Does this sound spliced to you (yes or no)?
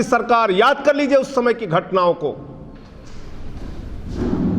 no